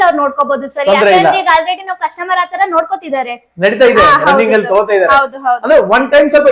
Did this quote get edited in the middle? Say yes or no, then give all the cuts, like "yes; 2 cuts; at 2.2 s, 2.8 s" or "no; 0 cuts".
no; 0 cuts